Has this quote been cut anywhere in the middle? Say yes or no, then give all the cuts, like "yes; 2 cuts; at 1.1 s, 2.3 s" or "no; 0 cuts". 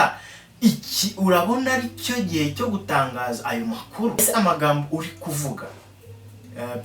yes; 1 cut; at 4.2 s